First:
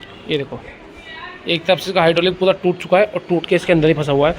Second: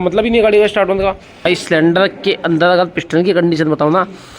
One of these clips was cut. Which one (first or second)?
second